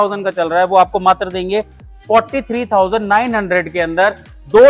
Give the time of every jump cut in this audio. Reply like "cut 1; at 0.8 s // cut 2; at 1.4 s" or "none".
none